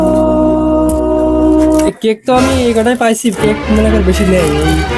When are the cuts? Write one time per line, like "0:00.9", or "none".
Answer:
0:01.9